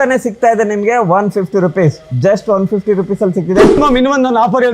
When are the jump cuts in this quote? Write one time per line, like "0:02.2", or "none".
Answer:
0:03.8